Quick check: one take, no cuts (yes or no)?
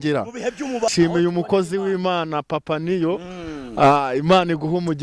no